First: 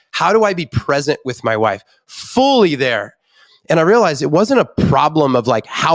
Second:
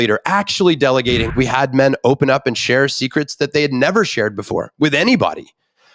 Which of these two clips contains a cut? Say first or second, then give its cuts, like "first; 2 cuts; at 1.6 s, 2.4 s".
second; 1 cut; at 1.3 s